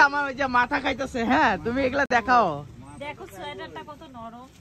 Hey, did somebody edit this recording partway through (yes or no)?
no